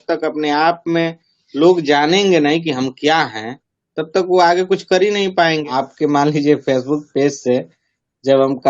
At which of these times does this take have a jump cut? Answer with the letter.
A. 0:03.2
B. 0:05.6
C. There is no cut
B